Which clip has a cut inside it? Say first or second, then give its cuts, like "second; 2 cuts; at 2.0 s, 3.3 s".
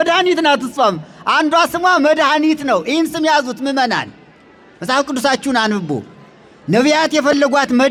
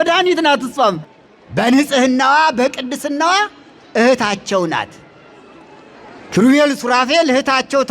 second; 1 cut; at 1.1 s